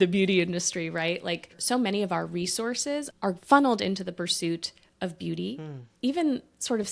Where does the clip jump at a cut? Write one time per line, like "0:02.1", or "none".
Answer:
0:01.6
0:03.2
0:05.8